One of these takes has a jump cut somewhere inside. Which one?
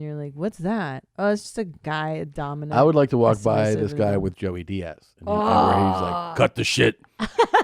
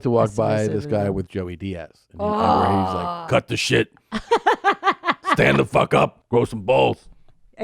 second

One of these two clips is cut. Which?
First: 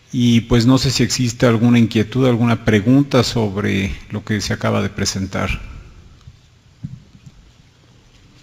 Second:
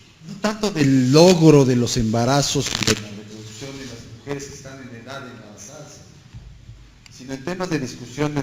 second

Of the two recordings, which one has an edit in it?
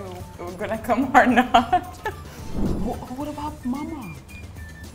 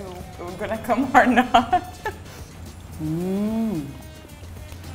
first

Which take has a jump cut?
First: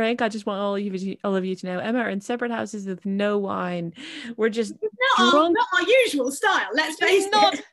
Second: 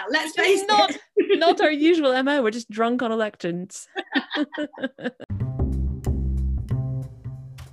second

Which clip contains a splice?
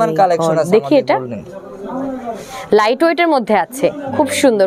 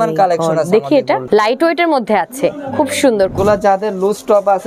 second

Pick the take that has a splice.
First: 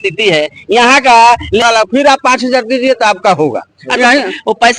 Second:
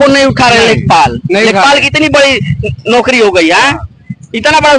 first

